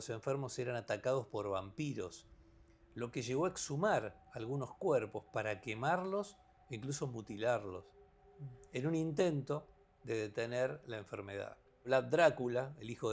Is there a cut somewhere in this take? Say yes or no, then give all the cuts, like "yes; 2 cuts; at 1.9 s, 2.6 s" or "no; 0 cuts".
yes; 1 cut; at 11.9 s